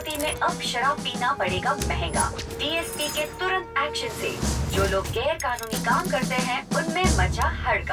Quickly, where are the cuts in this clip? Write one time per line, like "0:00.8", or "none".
none